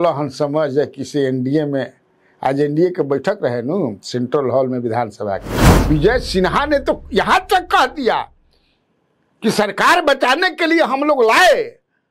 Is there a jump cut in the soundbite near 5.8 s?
yes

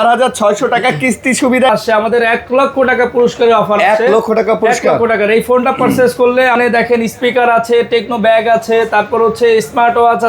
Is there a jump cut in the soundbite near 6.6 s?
yes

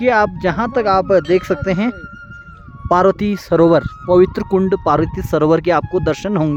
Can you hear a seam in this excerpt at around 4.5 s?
no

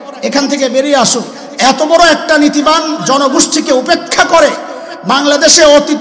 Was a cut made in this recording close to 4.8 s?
no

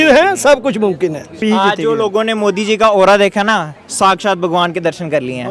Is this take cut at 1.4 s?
yes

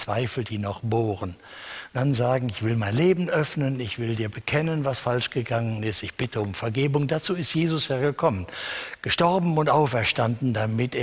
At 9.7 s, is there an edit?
yes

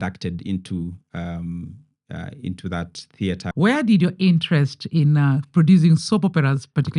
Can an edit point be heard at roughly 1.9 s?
no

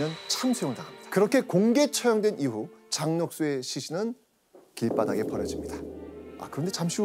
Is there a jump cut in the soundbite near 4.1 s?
no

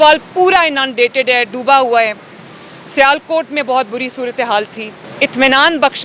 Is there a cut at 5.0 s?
yes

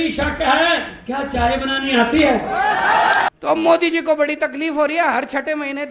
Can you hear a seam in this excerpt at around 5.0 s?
no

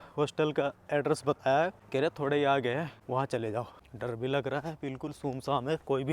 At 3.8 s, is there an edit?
yes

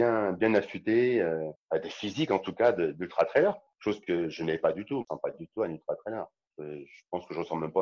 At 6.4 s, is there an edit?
yes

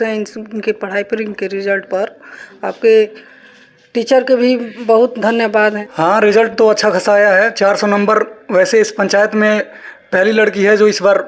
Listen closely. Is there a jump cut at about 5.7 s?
yes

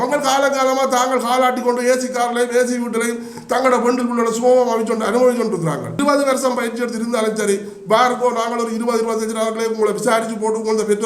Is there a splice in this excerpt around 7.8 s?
no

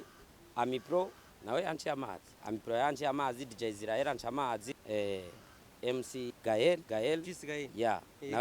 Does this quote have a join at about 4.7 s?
yes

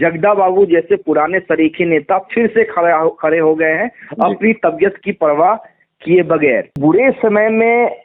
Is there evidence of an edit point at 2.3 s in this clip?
no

